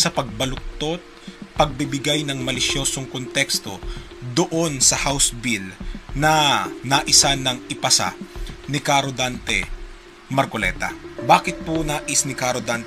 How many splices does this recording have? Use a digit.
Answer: 1